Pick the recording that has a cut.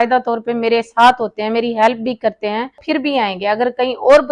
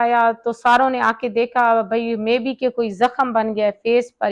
first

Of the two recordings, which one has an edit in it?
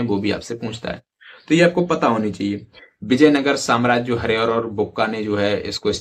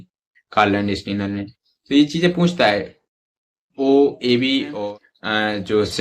second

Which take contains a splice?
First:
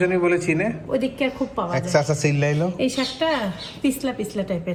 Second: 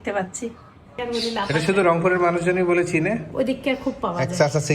second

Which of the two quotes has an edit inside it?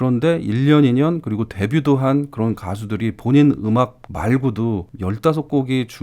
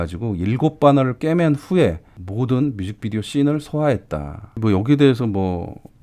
first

